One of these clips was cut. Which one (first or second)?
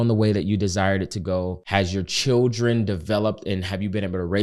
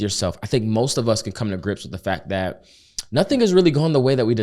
first